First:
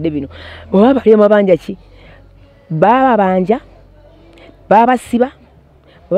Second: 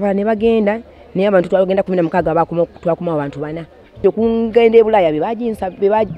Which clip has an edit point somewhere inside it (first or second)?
second